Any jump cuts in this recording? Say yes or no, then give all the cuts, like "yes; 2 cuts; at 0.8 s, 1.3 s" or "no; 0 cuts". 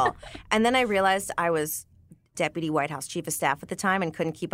yes; 1 cut; at 2.3 s